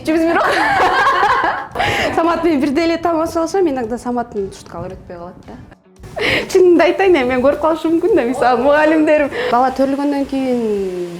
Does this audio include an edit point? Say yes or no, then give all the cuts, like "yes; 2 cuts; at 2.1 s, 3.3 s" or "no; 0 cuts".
yes; 3 cuts; at 1.8 s, 6.0 s, 9.5 s